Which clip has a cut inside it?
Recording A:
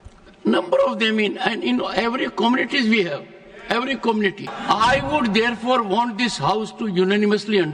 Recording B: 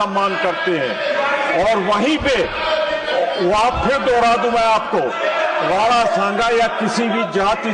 A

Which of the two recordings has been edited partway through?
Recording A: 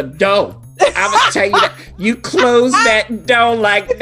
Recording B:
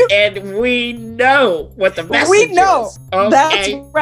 B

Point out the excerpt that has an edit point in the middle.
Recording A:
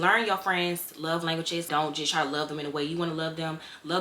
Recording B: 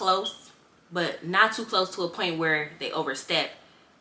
A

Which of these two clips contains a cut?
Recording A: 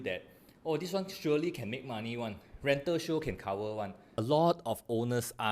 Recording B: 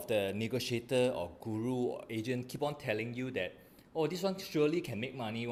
A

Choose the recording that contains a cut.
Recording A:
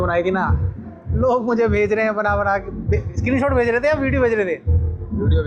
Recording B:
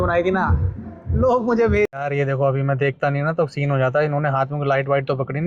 B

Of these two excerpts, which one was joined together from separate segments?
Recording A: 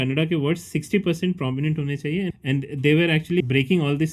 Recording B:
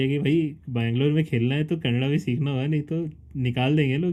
A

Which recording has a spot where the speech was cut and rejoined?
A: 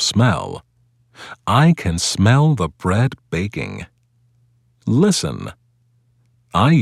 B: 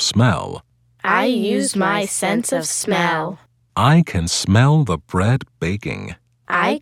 A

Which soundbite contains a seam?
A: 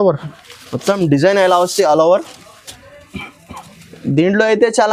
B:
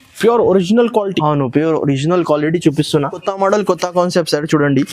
B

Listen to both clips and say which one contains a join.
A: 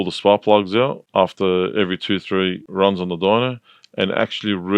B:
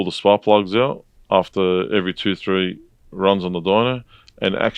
A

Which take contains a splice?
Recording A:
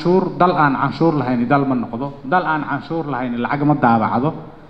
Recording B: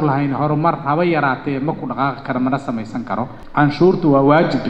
B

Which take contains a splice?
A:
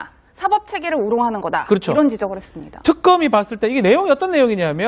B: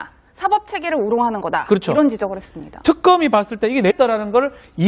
A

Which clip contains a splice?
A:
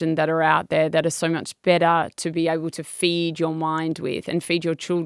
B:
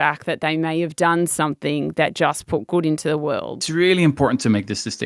B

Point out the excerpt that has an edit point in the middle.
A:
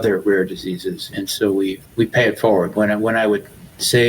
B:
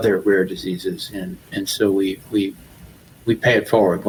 A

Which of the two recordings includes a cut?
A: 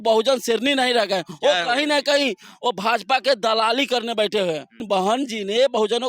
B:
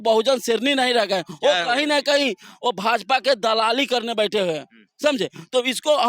A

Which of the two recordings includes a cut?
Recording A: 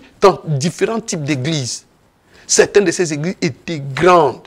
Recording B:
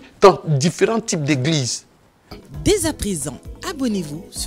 B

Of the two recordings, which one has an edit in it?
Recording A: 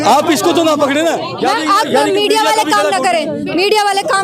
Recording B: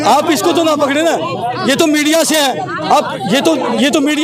A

